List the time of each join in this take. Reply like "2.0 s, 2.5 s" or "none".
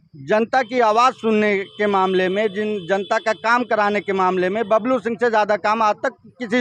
none